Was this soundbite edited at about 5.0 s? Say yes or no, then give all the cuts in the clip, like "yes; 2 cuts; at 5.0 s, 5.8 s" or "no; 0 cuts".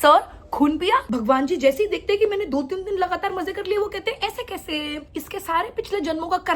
yes; 2 cuts; at 1.1 s, 5.0 s